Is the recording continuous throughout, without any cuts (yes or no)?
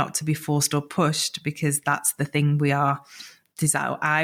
yes